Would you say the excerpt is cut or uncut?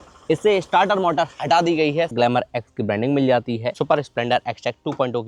cut